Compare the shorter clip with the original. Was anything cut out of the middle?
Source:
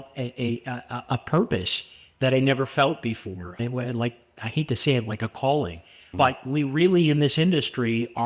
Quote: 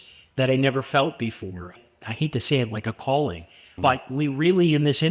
yes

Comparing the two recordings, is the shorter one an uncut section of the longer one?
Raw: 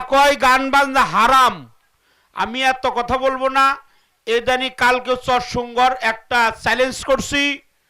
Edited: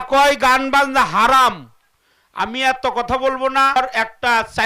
no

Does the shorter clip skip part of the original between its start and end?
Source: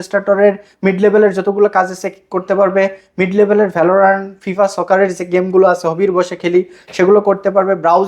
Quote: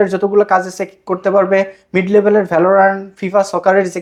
no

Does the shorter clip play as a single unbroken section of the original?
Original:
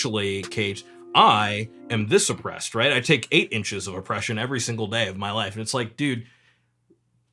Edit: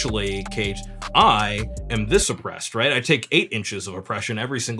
yes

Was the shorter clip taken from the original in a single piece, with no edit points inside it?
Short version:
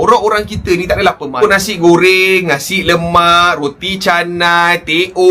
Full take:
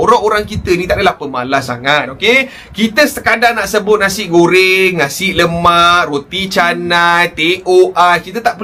no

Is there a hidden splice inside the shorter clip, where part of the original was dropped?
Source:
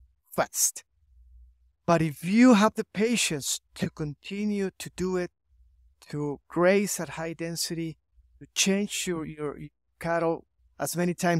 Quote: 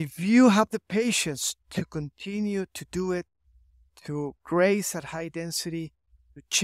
no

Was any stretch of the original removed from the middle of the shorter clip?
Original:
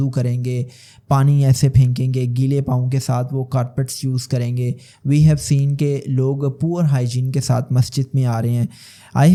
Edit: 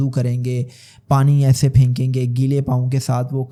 no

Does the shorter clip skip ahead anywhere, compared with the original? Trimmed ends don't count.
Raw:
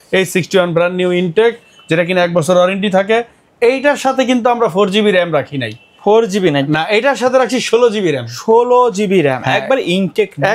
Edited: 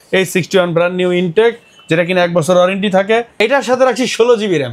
yes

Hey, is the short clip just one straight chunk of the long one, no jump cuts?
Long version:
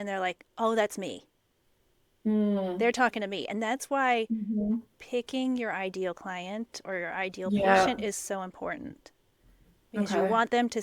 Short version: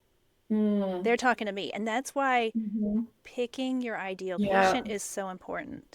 no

